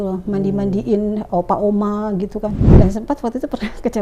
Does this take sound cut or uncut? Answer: cut